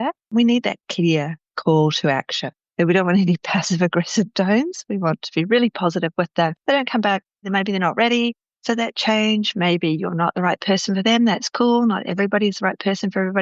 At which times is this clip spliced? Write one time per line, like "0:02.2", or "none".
0:02.7